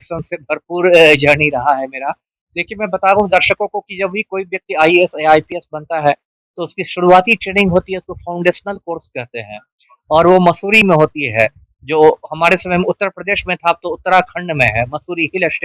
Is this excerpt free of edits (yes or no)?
yes